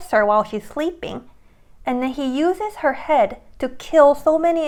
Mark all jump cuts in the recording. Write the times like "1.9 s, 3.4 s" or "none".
none